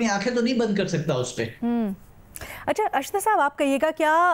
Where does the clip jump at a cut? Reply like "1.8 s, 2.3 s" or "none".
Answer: none